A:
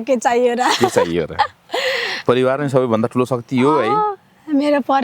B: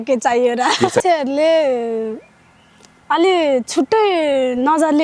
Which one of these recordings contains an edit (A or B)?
B